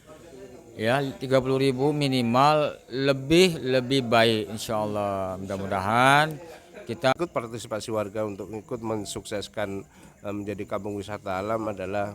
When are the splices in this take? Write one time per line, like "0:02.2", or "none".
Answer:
0:07.0